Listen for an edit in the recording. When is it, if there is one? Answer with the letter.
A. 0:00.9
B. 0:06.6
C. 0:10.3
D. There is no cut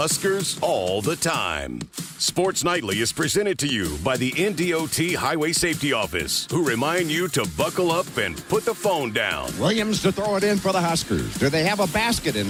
D